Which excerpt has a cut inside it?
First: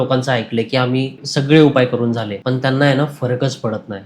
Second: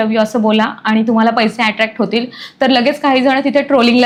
first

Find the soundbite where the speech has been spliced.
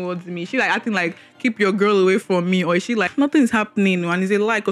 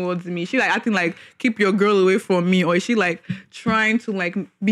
first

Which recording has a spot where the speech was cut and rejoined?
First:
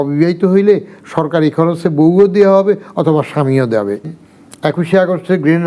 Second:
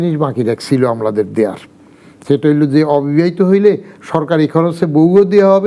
first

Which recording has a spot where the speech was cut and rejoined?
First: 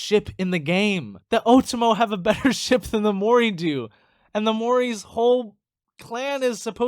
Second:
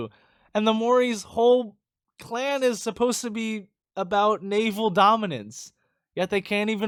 first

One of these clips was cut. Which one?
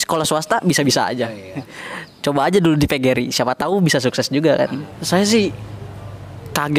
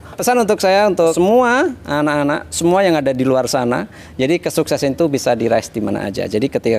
first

